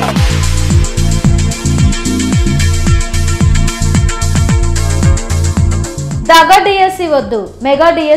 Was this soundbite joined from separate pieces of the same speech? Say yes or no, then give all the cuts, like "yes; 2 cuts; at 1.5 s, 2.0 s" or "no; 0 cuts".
yes; 1 cut; at 6.0 s